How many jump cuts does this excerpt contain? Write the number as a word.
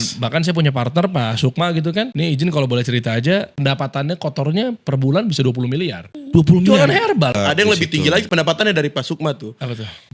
three